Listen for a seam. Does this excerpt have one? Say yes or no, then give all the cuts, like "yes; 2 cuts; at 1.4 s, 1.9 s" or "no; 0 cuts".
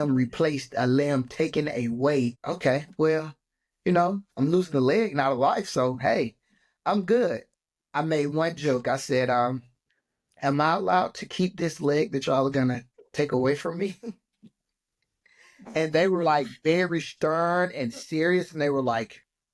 yes; 1 cut; at 2.5 s